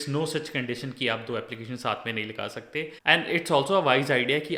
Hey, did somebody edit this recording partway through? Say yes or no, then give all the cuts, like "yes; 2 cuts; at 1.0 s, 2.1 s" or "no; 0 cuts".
yes; 1 cut; at 2.9 s